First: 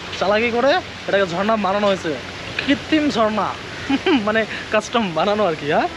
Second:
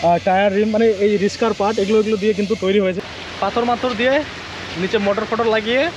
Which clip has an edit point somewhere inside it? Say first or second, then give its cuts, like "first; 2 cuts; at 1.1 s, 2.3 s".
second; 1 cut; at 3.0 s